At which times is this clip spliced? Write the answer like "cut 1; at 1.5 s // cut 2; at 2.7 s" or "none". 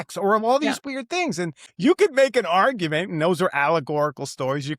cut 1; at 1.6 s